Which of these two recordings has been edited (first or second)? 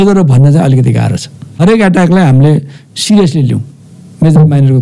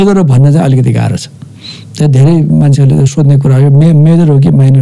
first